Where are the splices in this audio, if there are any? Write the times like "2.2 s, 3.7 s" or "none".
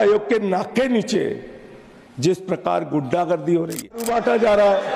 4.1 s